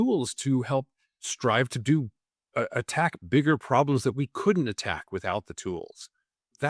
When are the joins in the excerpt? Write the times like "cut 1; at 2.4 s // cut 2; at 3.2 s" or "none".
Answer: none